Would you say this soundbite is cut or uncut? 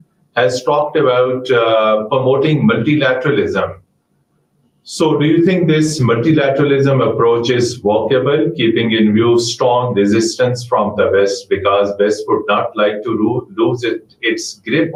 uncut